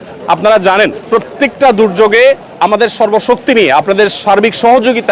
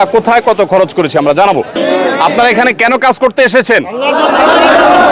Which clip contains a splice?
second; 1 cut; at 1.7 s

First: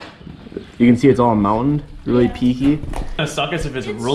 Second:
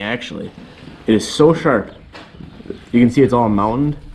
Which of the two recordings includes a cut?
first; 1 cut; at 3.2 s

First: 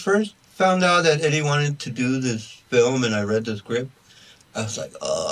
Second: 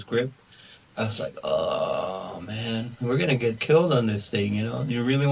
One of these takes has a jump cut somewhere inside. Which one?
second; 1 cut; at 3.0 s

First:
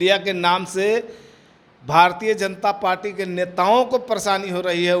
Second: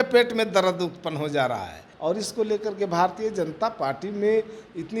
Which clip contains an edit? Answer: second; 1 cut; at 1.9 s

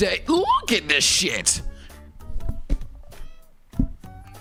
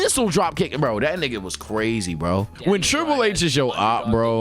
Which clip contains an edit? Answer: second; 1 cut; at 2.5 s

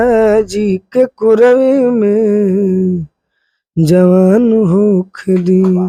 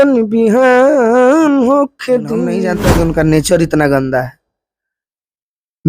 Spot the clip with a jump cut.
second; 1 cut; at 2.6 s

